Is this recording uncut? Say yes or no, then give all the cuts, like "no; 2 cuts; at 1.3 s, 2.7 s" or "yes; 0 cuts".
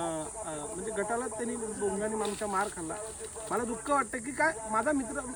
yes; 0 cuts